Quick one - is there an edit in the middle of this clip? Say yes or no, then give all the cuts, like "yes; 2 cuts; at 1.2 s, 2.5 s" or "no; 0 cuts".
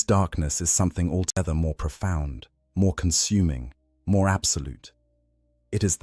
yes; 1 cut; at 1.4 s